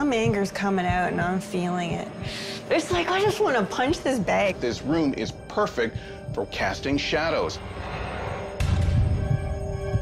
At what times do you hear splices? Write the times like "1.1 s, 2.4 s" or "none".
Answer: 2.0 s, 4.5 s